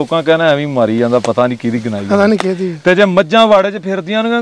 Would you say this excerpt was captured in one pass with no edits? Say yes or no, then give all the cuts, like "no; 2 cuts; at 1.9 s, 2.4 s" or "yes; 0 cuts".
yes; 0 cuts